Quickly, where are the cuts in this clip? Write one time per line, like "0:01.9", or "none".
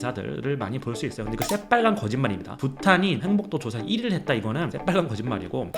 0:04.7